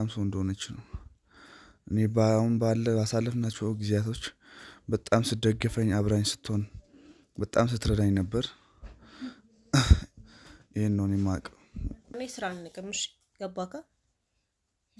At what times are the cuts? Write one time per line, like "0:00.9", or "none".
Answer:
0:12.1